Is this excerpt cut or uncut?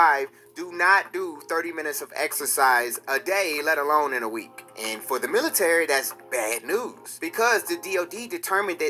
uncut